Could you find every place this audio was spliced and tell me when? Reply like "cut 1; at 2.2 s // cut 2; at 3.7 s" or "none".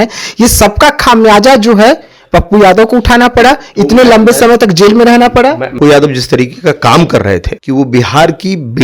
cut 1; at 5.8 s // cut 2; at 7.5 s